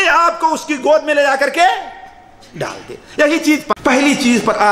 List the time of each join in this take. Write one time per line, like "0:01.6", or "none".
0:03.8